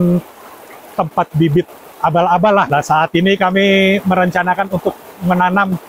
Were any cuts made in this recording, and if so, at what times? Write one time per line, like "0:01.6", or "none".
0:02.7